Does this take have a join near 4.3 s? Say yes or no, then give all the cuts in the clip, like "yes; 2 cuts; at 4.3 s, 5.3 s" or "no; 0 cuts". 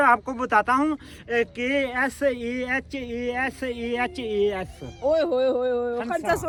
no; 0 cuts